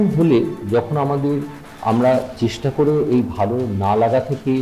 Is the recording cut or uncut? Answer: uncut